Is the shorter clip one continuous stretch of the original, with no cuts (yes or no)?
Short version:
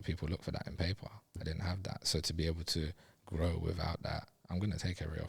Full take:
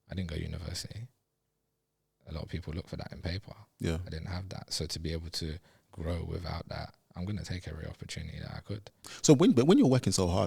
no